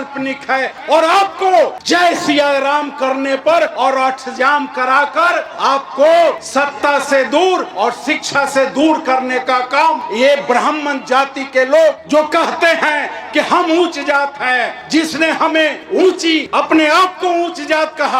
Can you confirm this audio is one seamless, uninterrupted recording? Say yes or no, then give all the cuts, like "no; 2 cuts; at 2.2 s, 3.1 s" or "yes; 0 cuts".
no; 8 cuts; at 1.8 s, 3.7 s, 5.5 s, 6.4 s, 7.7 s, 10.0 s, 12.0 s, 16.5 s